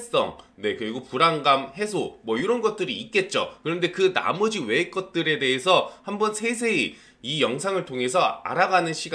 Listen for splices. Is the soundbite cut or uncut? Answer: uncut